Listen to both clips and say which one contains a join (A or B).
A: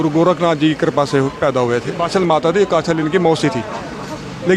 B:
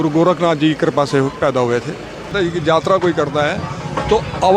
B